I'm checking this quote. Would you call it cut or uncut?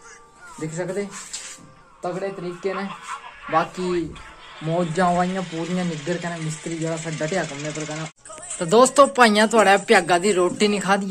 cut